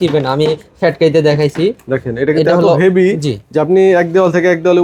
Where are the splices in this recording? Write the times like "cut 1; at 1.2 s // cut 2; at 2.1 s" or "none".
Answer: none